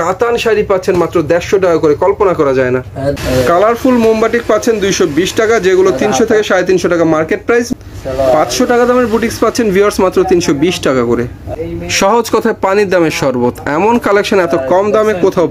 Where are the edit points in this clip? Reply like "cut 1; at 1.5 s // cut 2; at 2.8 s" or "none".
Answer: cut 1; at 3.1 s // cut 2; at 7.7 s // cut 3; at 11.4 s